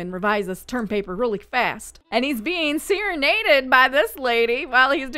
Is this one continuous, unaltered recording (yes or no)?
no